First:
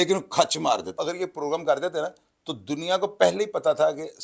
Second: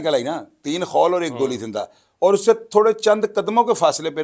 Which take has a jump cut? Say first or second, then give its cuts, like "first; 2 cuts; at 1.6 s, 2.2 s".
first; 1 cut; at 1.0 s